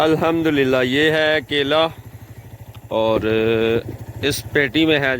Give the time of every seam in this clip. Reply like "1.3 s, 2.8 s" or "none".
none